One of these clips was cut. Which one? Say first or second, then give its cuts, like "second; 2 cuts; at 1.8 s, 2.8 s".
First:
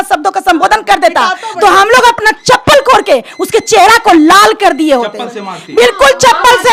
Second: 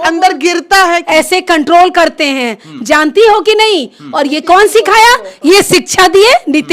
second; 1 cut; at 1.0 s